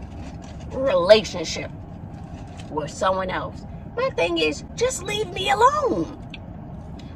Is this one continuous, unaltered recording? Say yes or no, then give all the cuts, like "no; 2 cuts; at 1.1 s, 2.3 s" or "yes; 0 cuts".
no; 1 cut; at 3.7 s